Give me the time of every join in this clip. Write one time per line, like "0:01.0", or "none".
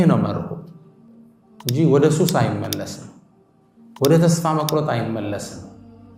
0:01.1